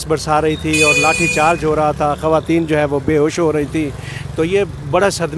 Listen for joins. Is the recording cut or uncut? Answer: uncut